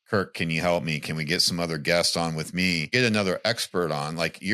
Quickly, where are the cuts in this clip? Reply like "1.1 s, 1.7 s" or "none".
2.9 s

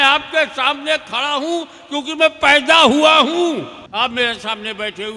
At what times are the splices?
3.8 s

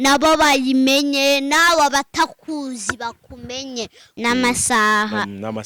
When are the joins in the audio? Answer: 4.1 s

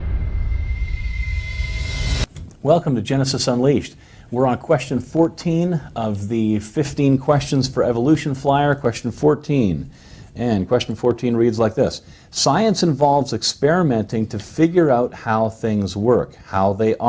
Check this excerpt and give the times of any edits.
9.2 s

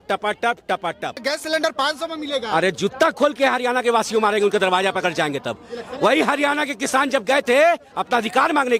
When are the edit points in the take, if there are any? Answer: 1.2 s

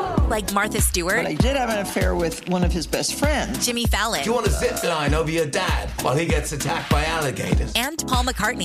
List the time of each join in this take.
none

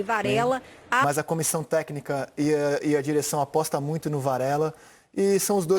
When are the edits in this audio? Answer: 1.0 s

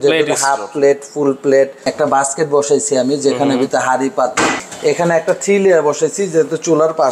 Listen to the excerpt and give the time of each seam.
1.8 s, 4.7 s

